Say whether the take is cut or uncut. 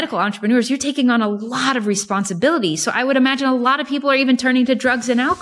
uncut